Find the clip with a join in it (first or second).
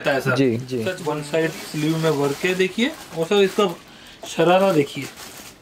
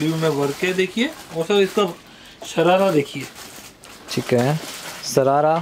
first